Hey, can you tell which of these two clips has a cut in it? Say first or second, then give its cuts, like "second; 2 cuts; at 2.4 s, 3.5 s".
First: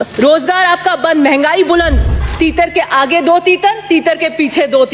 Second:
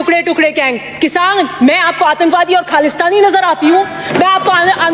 first; 1 cut; at 2.2 s